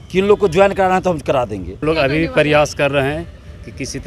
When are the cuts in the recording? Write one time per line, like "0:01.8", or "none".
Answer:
0:01.8